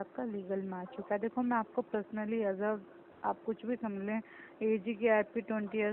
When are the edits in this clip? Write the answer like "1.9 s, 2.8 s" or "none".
none